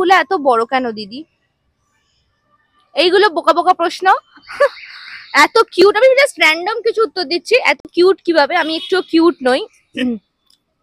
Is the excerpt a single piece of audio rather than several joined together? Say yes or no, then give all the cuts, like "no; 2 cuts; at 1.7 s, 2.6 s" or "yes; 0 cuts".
yes; 0 cuts